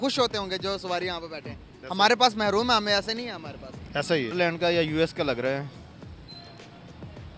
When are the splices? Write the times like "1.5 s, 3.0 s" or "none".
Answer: 4.3 s